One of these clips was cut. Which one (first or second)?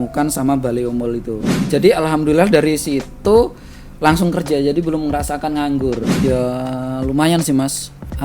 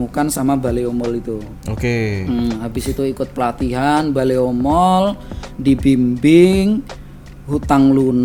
first